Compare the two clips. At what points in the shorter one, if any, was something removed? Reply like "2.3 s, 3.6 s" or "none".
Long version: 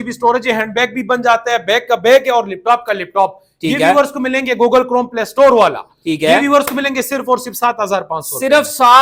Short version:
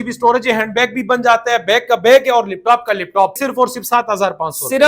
3.4 s